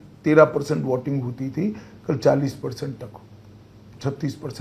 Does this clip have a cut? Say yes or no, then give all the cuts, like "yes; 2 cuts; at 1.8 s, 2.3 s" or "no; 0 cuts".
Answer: no; 0 cuts